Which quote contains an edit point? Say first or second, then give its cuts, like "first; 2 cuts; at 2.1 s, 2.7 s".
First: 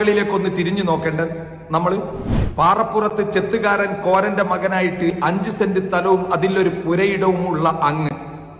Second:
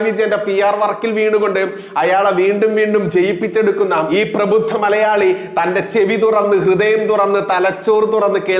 first; 1 cut; at 2.4 s